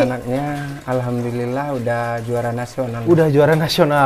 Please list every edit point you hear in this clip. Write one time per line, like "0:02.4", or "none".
none